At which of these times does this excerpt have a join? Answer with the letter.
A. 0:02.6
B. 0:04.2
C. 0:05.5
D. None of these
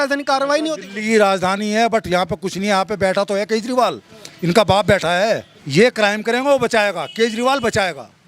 C